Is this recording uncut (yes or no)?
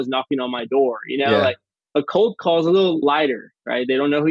no